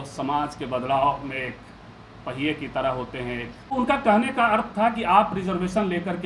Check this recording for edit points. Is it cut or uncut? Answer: cut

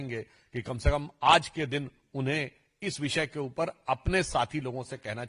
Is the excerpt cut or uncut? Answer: uncut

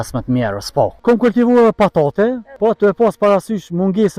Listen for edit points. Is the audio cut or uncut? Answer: cut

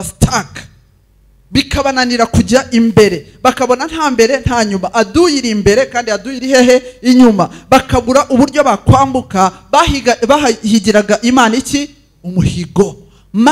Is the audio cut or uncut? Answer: uncut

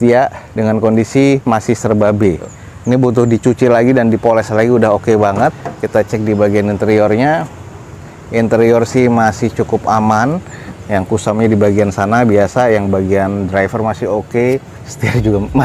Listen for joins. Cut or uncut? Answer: uncut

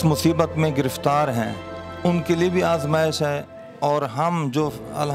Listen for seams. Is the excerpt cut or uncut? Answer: uncut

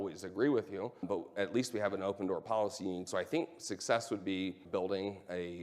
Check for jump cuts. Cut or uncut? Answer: cut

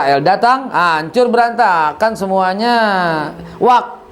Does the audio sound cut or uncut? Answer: uncut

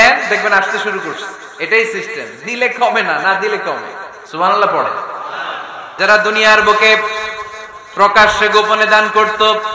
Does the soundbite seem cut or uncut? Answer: cut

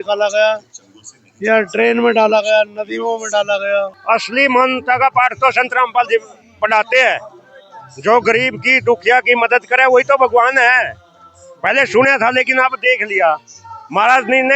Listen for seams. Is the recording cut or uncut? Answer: cut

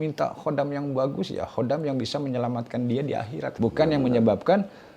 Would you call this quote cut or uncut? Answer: cut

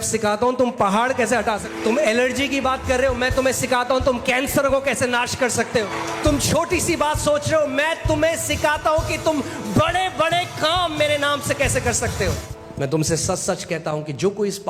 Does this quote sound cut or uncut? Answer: cut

